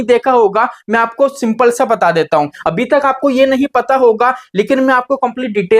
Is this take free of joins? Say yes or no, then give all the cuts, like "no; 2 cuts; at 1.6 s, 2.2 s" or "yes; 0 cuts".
no; 1 cut; at 2.6 s